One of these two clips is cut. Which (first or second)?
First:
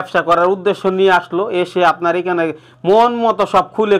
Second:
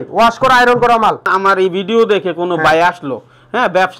second